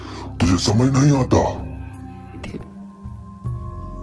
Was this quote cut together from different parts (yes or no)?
yes